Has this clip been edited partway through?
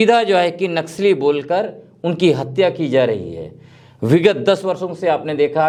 no; 0 cuts

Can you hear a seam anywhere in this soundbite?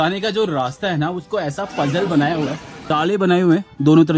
yes; 1 cut; at 2.9 s

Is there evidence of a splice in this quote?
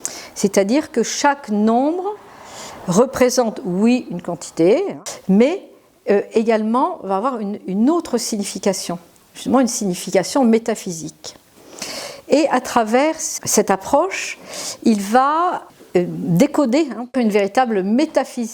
yes; 4 cuts; at 5.0 s, 13.2 s, 15.6 s, 17.1 s

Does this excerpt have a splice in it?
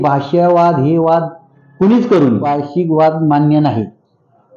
yes; 1 cut; at 2.6 s

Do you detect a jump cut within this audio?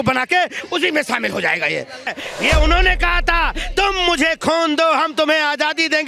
yes; 1 cut; at 2.0 s

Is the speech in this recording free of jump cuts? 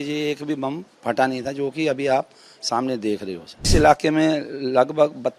no; 1 cut; at 3.7 s

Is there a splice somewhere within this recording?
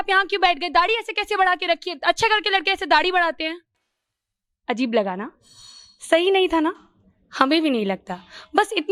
no; 0 cuts

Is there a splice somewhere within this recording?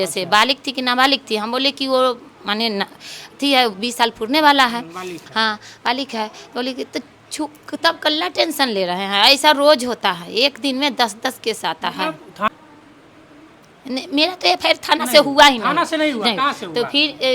yes; 1 cut; at 12.5 s

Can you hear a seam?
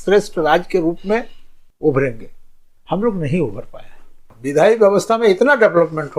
yes; 1 cut; at 4.4 s

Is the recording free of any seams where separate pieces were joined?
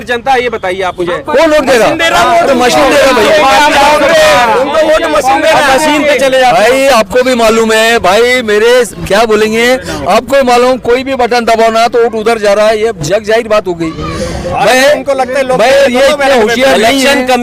yes; 0 cuts

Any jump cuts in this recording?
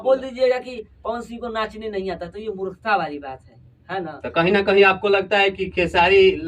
no; 0 cuts

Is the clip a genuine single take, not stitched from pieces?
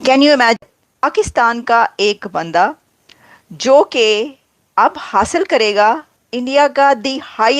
no; 2 cuts; at 1.0 s, 6.1 s

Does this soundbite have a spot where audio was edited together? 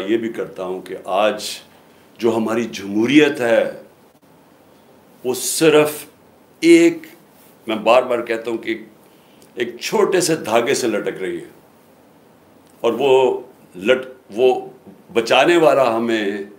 no; 0 cuts

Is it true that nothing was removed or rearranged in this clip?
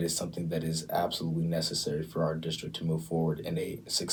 yes; 0 cuts

